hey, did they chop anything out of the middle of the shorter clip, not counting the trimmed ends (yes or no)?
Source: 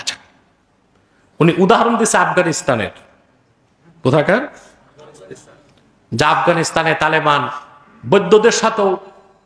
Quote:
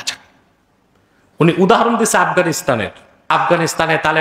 yes